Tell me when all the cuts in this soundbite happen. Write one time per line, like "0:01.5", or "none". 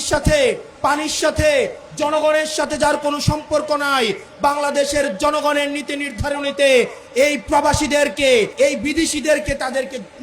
0:08.5